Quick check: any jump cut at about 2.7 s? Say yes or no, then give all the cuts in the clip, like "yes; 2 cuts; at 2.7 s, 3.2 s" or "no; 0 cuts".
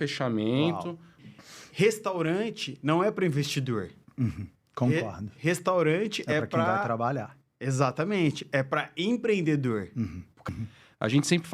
no; 2 cuts; at 1.2 s, 10.5 s